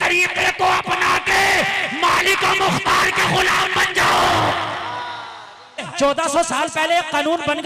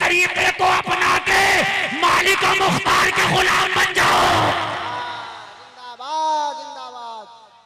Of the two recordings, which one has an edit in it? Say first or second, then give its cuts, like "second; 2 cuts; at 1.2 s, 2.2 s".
first; 1 cut; at 5.8 s